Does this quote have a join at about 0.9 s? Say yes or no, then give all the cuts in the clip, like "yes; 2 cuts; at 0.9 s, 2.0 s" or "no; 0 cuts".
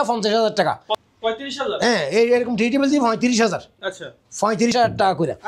yes; 2 cuts; at 0.9 s, 4.7 s